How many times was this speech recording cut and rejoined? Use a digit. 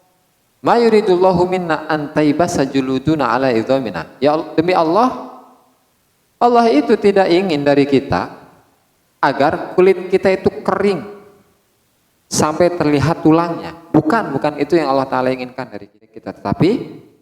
1